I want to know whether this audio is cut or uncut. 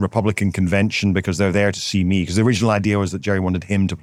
uncut